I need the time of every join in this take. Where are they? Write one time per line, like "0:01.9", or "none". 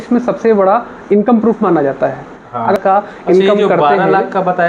0:02.8